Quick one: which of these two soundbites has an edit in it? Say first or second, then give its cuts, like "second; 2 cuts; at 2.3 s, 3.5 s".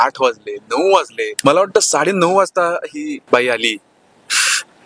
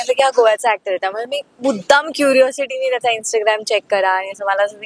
first; 2 cuts; at 1.3 s, 3.2 s